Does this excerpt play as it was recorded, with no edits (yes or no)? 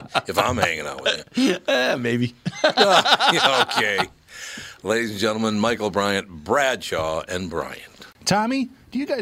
no